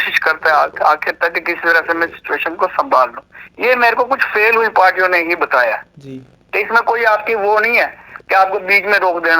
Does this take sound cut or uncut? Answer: uncut